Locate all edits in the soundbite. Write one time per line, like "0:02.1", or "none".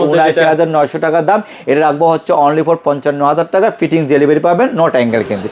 none